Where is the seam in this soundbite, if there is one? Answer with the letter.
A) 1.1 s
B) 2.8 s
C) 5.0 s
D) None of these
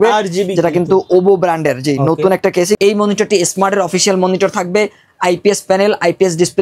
B